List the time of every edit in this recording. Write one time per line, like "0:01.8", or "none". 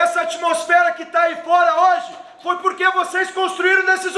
none